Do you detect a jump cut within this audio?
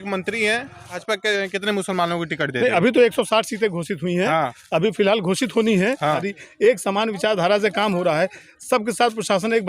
yes; 2 cuts; at 1.0 s, 6.3 s

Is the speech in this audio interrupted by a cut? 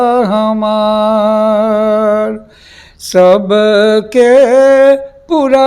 no; 0 cuts

